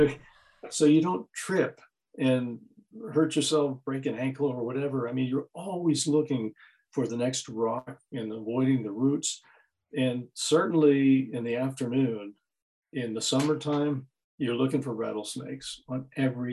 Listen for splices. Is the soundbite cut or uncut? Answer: uncut